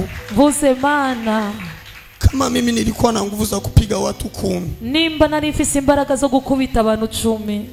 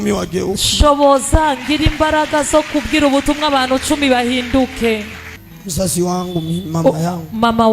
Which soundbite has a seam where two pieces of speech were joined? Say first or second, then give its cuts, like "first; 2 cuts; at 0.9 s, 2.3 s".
second; 1 cut; at 5.4 s